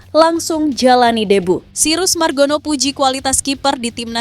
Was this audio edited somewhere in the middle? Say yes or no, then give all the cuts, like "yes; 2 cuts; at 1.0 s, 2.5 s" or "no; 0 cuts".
yes; 1 cut; at 1.7 s